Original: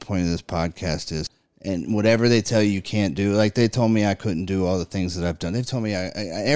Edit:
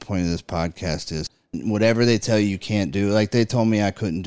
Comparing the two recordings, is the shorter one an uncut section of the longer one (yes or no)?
no